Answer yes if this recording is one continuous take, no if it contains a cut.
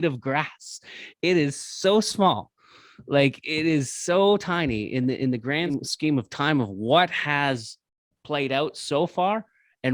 no